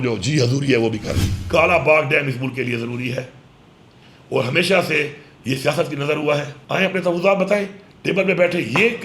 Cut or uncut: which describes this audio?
cut